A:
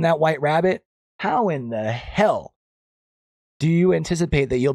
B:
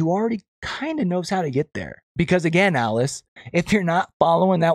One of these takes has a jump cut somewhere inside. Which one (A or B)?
B